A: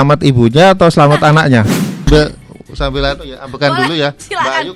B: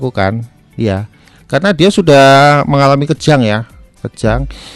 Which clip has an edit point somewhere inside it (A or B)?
A